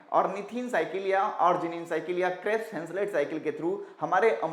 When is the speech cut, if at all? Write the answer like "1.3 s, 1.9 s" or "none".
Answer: none

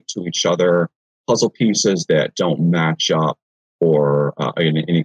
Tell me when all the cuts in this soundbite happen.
1.1 s

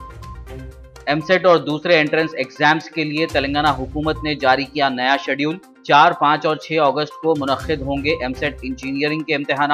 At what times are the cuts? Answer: none

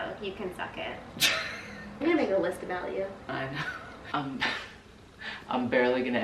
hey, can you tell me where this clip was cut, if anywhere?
2.0 s, 4.0 s

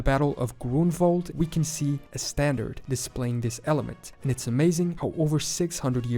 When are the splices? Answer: 1.3 s

